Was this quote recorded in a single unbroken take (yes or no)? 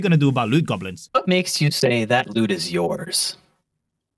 no